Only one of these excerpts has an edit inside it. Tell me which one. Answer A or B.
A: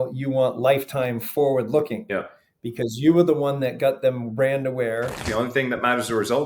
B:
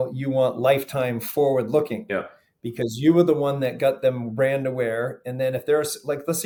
A